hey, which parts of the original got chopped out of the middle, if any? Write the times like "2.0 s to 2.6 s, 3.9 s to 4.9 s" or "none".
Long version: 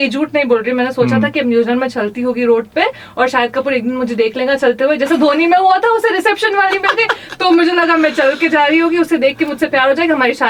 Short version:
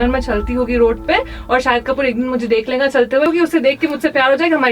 5.0 s to 8.9 s